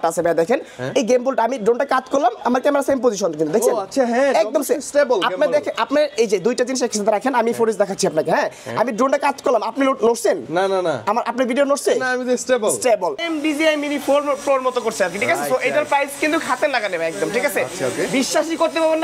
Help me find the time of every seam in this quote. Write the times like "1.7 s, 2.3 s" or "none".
13.2 s